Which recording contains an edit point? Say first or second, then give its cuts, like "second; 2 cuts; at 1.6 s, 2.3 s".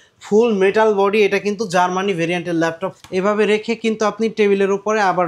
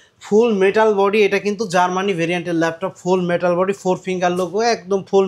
first; 1 cut; at 2.9 s